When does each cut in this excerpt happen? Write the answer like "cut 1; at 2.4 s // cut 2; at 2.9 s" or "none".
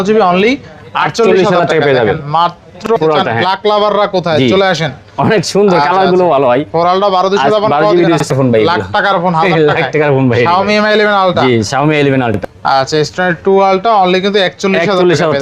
cut 1; at 2.9 s // cut 2; at 8.3 s // cut 3; at 12.4 s